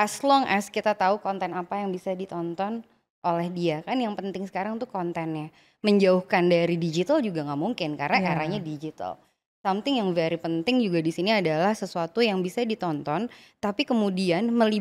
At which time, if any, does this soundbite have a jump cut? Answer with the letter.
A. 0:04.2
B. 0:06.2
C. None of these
C